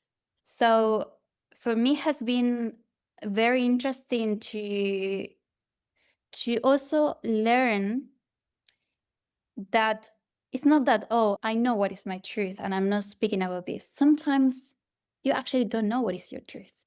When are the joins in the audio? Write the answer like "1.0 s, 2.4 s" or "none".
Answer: none